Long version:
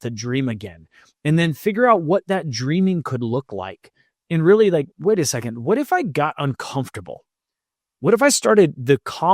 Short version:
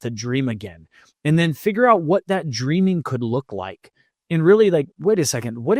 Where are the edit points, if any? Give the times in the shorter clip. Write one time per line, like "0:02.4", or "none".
none